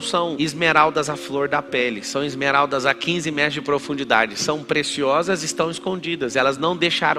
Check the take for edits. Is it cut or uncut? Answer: uncut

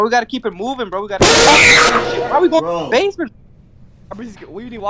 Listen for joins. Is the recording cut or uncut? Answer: cut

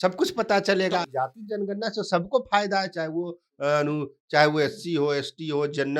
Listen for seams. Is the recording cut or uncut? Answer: cut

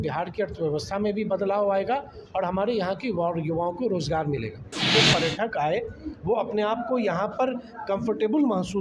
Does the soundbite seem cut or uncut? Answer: cut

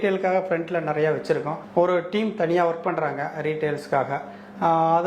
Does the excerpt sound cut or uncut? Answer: uncut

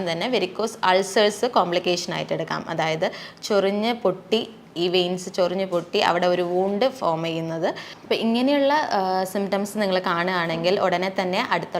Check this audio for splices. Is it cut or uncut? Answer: cut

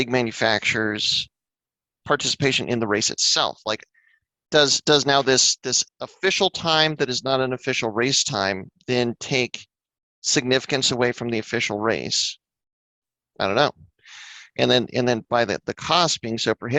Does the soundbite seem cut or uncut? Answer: uncut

